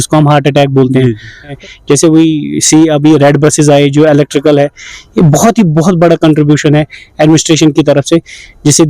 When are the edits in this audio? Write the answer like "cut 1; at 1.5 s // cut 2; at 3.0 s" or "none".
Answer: cut 1; at 1.5 s